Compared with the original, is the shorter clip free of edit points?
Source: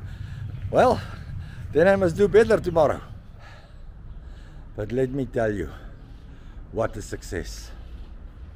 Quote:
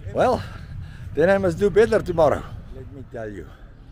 no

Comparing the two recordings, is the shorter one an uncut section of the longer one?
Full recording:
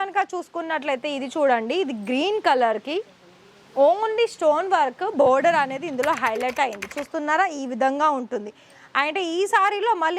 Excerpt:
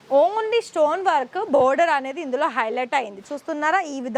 yes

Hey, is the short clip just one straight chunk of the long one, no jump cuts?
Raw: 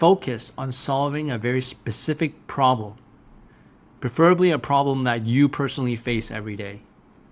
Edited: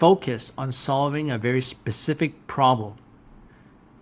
yes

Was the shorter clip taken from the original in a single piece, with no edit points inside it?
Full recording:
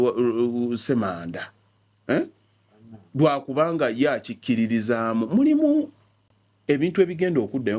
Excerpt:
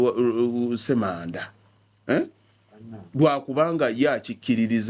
yes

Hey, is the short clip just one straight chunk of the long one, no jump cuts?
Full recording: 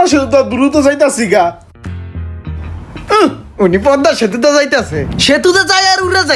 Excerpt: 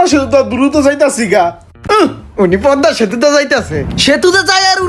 no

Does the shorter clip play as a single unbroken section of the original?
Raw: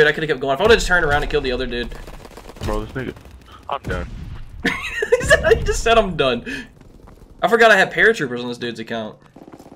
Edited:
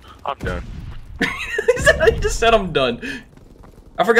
yes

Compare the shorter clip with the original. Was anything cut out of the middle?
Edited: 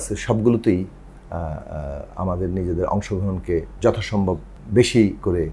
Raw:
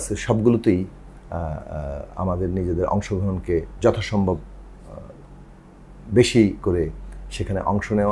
yes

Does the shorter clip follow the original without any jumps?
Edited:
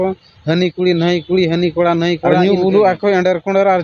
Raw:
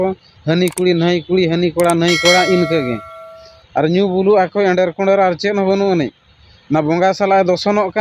no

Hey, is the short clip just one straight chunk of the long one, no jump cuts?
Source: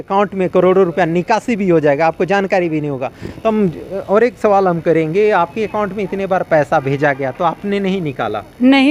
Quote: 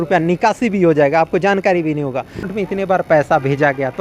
no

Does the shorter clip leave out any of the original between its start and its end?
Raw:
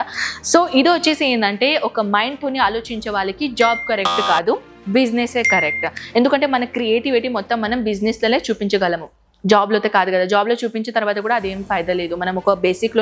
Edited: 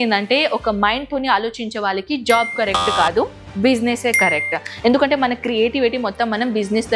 no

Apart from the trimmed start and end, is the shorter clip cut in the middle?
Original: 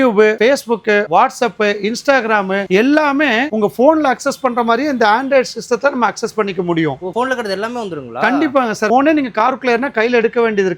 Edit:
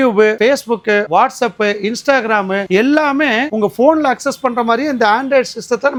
no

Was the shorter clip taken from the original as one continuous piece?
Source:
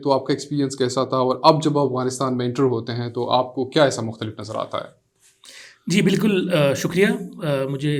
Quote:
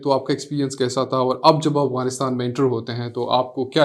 yes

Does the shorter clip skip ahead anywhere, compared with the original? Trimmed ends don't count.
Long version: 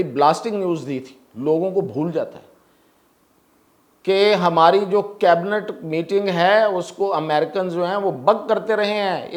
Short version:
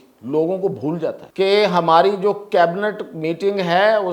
yes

